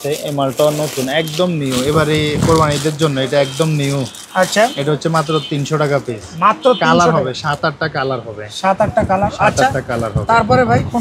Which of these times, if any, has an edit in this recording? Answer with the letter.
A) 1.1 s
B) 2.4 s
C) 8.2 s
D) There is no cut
D